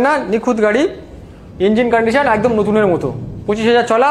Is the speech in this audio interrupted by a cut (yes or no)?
no